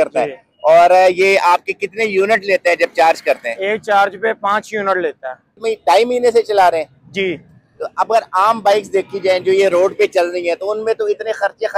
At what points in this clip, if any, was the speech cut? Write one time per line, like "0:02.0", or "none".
0:05.5